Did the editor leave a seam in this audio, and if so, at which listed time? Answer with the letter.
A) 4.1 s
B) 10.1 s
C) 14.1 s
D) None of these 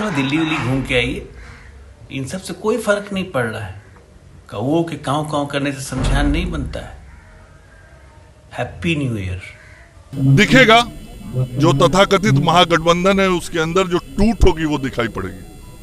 B